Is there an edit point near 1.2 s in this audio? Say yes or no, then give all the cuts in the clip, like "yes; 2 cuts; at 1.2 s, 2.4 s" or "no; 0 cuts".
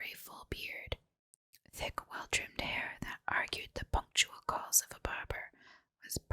yes; 1 cut; at 1.2 s